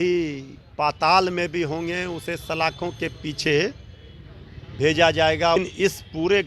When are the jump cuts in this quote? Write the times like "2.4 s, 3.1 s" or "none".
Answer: 5.6 s